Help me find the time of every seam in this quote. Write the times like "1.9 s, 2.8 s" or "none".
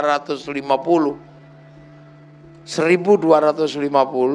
1.4 s, 2.7 s